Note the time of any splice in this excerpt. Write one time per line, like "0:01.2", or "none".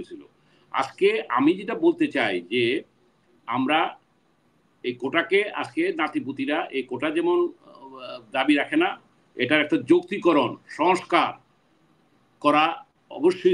none